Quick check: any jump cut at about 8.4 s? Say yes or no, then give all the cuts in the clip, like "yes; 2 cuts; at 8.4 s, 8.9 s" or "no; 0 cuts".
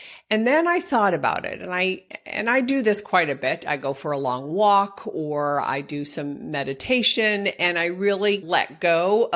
yes; 1 cut; at 8.4 s